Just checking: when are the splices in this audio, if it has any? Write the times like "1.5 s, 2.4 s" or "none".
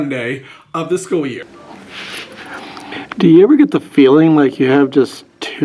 1.7 s